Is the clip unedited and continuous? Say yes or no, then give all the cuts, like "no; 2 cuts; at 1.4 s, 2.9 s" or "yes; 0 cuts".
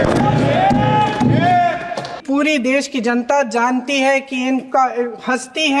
no; 1 cut; at 2.1 s